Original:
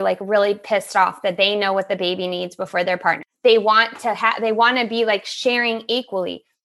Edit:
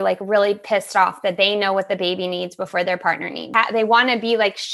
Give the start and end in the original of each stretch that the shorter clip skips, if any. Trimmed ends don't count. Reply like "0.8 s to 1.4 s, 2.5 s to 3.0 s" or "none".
3.4 s to 4.1 s